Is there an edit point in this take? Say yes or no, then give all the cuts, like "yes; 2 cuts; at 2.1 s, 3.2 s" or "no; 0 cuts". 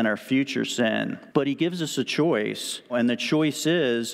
yes; 2 cuts; at 1.2 s, 2.9 s